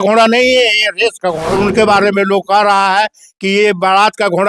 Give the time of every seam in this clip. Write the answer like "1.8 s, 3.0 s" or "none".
1.4 s